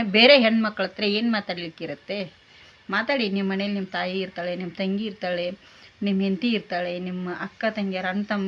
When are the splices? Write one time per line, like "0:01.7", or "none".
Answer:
none